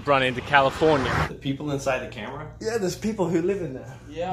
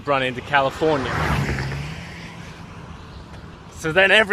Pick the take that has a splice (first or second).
first